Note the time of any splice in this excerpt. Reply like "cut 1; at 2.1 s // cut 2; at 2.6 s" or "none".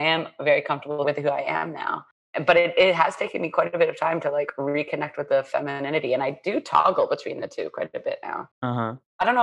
cut 1; at 1.0 s // cut 2; at 2.2 s